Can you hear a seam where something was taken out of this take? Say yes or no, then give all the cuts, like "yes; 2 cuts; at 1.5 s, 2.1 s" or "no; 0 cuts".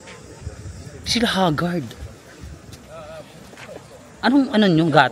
no; 0 cuts